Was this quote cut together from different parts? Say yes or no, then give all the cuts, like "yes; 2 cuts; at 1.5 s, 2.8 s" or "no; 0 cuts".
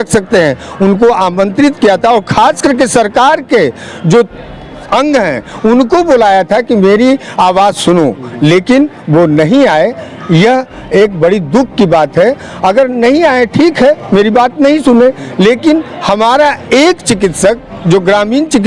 no; 0 cuts